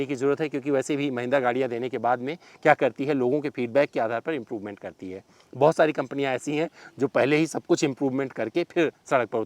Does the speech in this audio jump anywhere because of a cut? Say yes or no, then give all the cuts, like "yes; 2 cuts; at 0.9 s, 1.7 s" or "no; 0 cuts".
no; 0 cuts